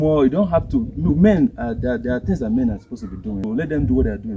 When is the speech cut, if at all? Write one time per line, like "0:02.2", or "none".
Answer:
0:03.4

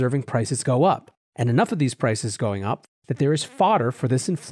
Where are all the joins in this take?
0:02.8

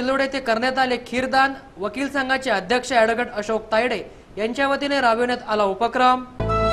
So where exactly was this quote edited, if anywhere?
none

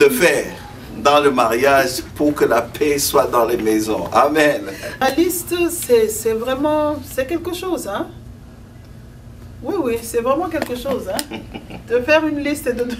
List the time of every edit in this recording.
0:05.0

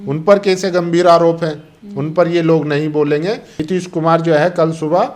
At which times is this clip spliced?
0:03.5

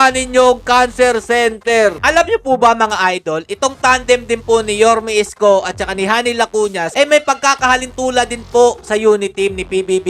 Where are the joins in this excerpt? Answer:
0:02.0

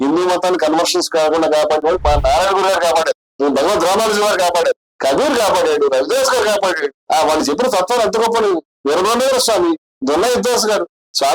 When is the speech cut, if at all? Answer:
0:03.3
0:04.9
0:06.9

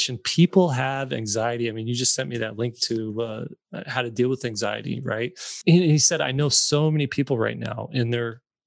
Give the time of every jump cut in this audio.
0:05.5

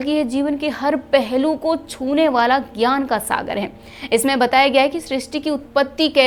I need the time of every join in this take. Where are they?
none

